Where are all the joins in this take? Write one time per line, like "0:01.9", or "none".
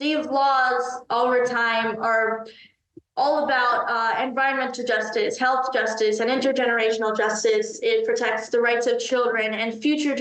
none